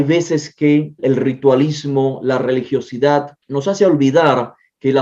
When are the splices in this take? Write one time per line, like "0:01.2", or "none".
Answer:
0:01.0
0:03.4